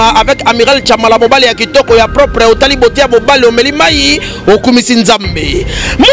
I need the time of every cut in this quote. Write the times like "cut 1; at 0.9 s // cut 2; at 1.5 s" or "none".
none